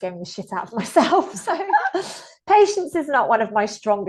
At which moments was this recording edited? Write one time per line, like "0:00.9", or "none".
0:01.4